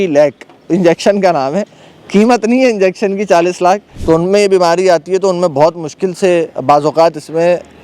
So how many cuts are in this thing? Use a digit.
1